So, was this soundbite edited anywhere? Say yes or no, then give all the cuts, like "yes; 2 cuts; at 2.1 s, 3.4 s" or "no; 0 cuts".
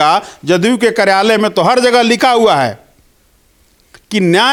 no; 0 cuts